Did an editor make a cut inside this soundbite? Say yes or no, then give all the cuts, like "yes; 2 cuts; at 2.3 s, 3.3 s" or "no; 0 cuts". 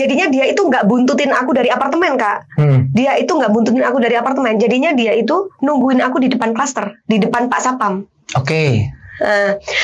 no; 0 cuts